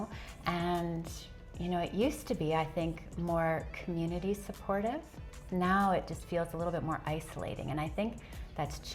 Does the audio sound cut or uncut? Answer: uncut